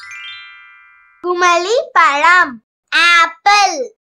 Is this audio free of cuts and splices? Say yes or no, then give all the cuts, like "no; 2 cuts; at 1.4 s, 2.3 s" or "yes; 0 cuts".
yes; 0 cuts